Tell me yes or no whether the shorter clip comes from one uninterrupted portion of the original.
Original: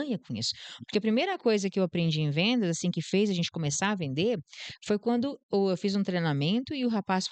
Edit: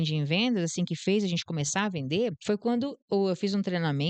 no